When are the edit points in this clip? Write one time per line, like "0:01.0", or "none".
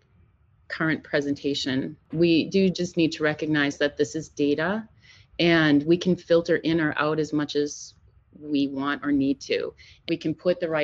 0:02.0
0:09.9